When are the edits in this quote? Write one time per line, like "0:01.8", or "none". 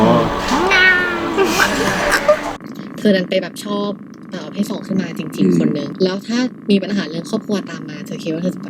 0:02.5
0:05.9

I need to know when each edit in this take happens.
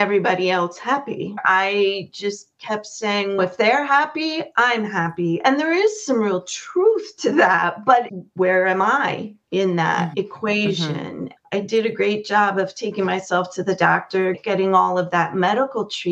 0:01.4
0:11.3

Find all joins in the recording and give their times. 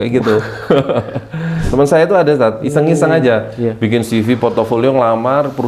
0:01.6

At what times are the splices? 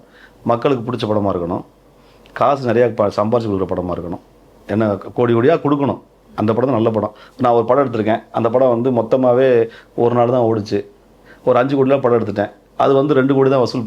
none

